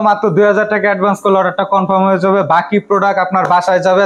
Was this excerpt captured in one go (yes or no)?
yes